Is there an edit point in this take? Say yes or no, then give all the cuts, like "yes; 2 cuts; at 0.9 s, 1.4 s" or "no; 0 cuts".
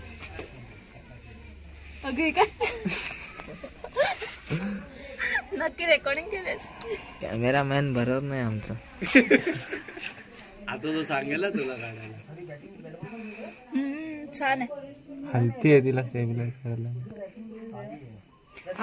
no; 0 cuts